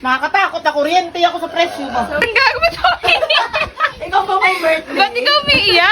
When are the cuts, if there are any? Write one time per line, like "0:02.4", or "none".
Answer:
0:02.2